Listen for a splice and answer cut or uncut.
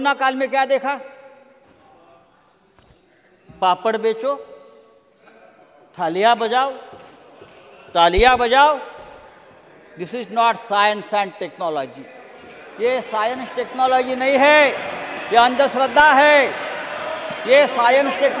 uncut